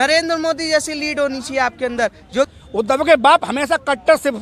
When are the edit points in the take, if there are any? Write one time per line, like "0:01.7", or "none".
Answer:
0:02.5